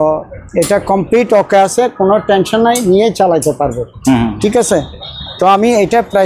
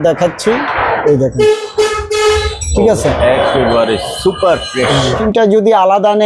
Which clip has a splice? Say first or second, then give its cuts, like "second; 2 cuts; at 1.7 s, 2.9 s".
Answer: second; 1 cut; at 5.2 s